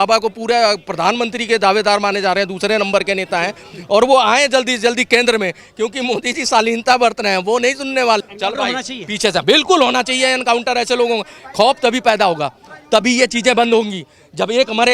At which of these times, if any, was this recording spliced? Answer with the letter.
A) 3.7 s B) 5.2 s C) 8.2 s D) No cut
C